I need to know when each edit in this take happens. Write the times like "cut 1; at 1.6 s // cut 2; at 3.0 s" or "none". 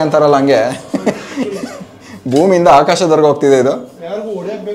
none

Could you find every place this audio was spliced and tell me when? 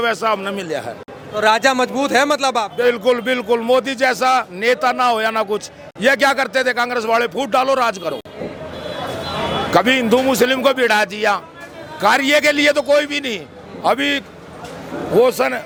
none

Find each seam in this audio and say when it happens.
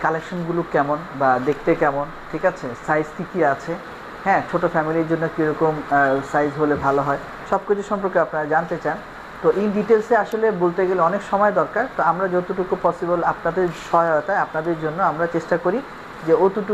none

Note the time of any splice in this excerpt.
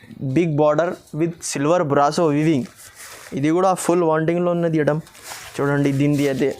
none

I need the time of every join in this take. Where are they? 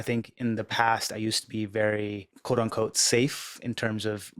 cut 1; at 2.3 s

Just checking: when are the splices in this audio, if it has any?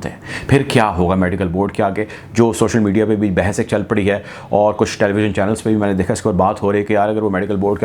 none

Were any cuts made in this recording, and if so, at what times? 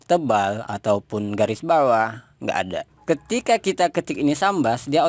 cut 1; at 2.9 s

